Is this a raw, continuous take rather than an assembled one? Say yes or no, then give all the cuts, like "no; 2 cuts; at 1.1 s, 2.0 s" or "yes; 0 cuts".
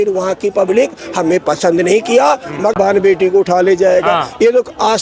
no; 1 cut; at 2.7 s